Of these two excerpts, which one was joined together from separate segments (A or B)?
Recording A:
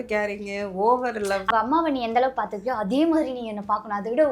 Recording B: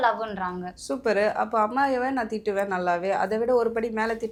A